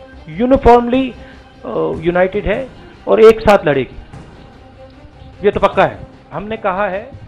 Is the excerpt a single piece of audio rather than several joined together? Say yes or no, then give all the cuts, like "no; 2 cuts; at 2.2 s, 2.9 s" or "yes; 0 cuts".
no; 1 cut; at 6.0 s